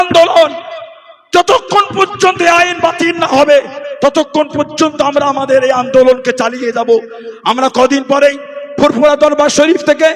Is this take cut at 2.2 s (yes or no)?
no